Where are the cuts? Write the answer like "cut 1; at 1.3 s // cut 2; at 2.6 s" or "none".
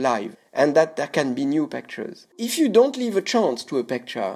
cut 1; at 2.4 s